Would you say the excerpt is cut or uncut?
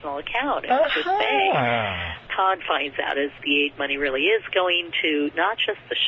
cut